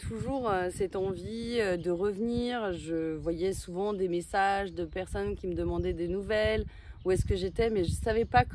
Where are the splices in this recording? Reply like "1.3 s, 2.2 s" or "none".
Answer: none